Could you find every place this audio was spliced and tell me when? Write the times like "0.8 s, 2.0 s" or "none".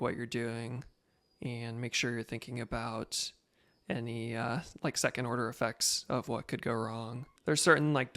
7.2 s